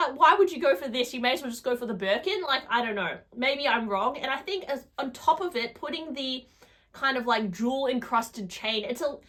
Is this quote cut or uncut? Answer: uncut